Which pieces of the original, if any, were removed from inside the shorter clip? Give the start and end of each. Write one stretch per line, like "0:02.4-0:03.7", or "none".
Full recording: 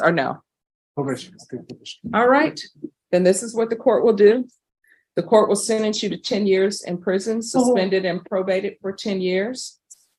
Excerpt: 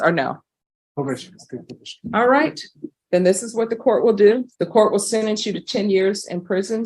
0:04.5-0:05.1